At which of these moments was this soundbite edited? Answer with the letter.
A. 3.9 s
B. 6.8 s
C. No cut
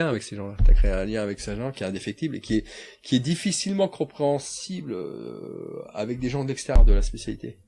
B